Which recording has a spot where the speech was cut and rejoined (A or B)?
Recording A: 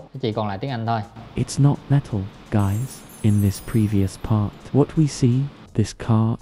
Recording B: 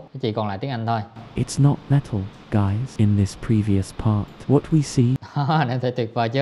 B